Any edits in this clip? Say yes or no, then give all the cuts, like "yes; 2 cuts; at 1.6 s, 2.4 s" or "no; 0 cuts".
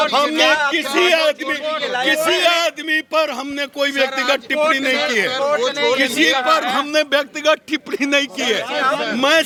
no; 0 cuts